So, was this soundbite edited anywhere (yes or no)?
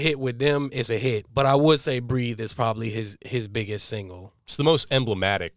yes